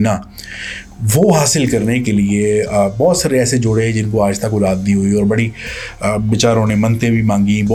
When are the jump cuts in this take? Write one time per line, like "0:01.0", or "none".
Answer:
none